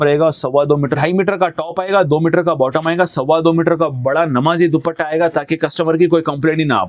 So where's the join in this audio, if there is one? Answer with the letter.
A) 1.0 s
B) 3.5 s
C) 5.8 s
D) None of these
A